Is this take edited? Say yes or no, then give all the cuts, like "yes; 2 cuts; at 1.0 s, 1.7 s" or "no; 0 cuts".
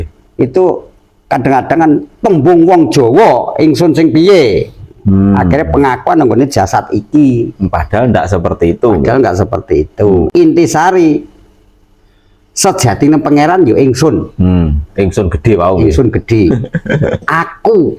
yes; 1 cut; at 10.3 s